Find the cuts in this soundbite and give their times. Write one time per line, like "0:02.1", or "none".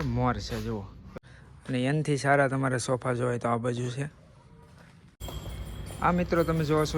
0:01.0
0:05.2